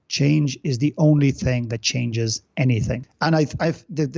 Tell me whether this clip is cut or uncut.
cut